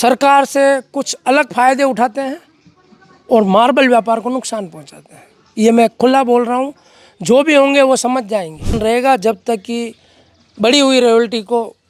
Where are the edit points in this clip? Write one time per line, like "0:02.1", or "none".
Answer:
0:08.8